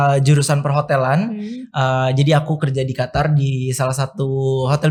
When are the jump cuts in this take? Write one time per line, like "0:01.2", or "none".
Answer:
none

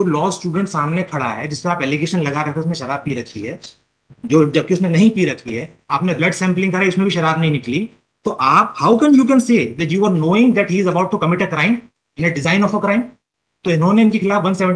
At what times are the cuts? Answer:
none

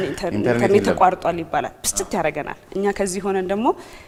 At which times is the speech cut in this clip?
none

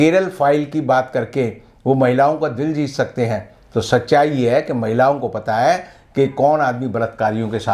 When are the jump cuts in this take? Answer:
none

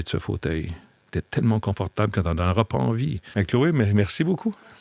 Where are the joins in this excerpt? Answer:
0:03.2

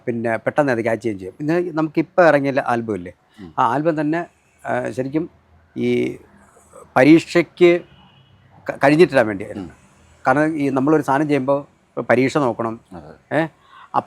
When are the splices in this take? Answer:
none

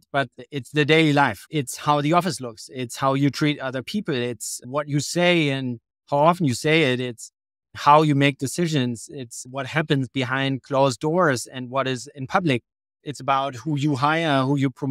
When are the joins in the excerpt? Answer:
none

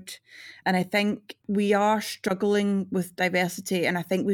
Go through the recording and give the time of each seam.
none

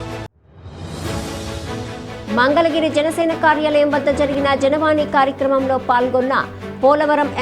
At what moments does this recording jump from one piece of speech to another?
0:02.2

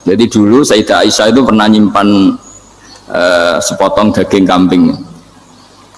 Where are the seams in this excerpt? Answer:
none

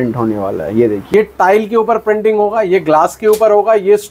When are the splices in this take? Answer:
0:01.0

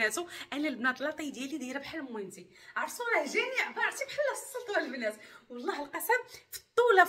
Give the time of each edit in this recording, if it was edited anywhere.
none

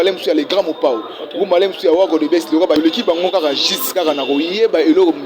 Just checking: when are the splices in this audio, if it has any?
0:02.8

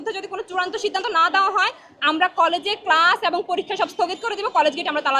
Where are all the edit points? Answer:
none

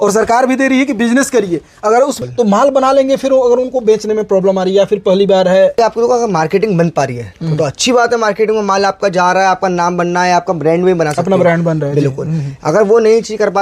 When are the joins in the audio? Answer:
0:02.2
0:05.7

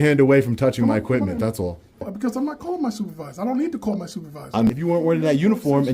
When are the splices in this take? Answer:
0:02.1
0:04.7

